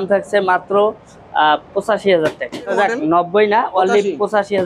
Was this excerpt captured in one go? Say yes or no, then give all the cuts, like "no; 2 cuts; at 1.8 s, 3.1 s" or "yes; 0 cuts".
no; 1 cut; at 2.7 s